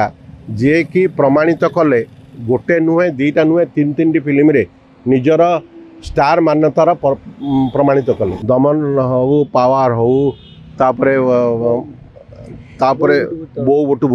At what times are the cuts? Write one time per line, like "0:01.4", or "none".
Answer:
0:08.4